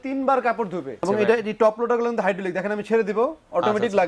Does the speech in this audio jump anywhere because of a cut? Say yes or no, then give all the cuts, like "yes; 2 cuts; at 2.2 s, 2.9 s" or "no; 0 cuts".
yes; 1 cut; at 1.1 s